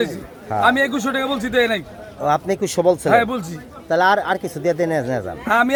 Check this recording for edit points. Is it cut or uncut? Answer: uncut